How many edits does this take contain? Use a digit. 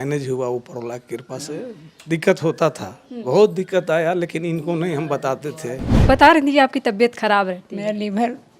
1